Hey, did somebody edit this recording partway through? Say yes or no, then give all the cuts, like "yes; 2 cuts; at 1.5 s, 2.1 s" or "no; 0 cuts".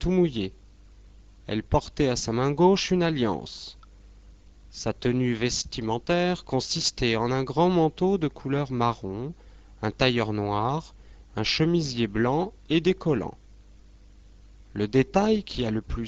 no; 0 cuts